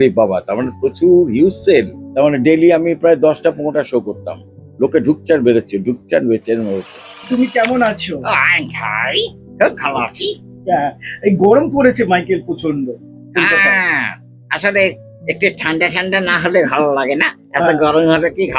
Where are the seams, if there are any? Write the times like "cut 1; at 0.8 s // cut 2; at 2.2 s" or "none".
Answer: cut 1; at 2.0 s // cut 2; at 7.2 s